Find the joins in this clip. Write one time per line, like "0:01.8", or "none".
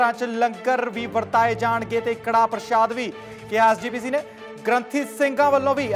none